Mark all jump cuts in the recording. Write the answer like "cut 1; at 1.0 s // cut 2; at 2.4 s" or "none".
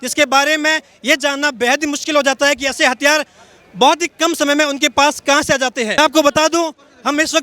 cut 1; at 6.0 s